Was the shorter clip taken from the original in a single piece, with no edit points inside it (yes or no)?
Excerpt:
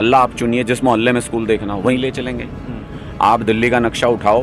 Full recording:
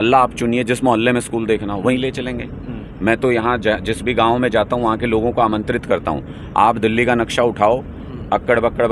no